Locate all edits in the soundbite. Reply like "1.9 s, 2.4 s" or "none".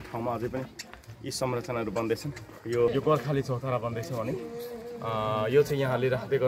2.9 s